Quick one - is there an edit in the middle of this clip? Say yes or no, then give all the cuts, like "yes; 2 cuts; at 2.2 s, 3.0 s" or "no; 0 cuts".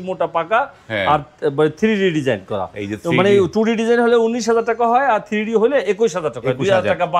no; 0 cuts